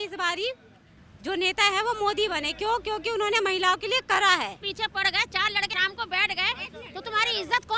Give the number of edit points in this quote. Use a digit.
2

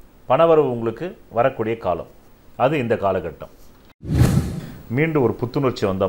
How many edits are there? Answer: 1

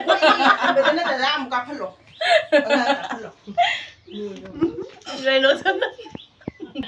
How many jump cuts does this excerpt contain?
0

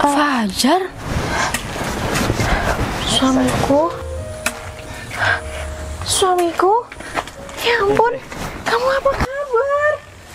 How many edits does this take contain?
0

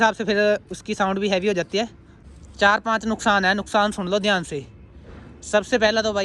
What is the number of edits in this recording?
1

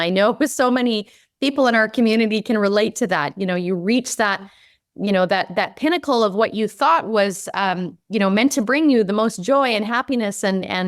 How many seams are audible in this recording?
0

